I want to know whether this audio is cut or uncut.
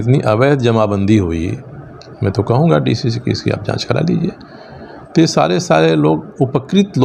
uncut